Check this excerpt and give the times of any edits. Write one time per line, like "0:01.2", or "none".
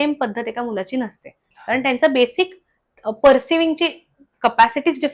none